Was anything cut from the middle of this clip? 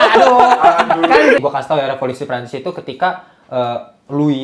yes; 1 cut; at 1.4 s

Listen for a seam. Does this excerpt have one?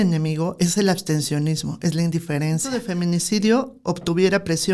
yes; 1 cut; at 2.9 s

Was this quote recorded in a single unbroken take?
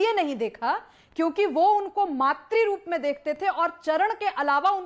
yes; 0 cuts

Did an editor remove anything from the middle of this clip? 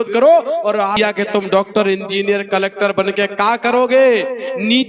yes; 1 cut; at 0.9 s

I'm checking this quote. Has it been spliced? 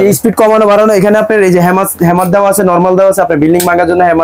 no; 0 cuts

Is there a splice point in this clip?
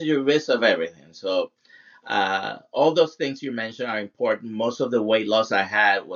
no; 0 cuts

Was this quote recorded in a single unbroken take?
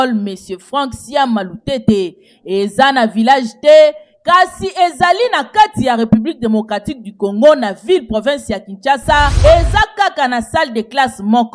no; 1 cut; at 9.3 s

